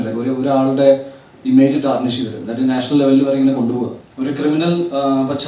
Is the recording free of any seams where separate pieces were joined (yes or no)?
no